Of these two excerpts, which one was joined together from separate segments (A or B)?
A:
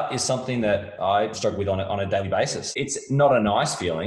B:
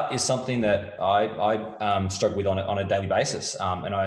A